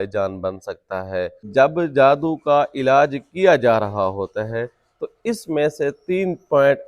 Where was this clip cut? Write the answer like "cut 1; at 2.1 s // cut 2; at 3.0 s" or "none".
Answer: cut 1; at 1.4 s